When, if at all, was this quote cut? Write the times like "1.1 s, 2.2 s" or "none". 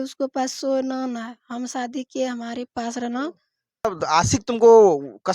3.9 s